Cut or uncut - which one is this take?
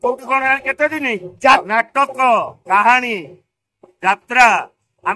cut